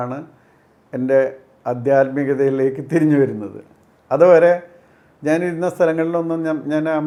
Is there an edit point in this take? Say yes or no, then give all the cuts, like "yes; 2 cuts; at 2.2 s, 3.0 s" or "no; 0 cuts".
no; 0 cuts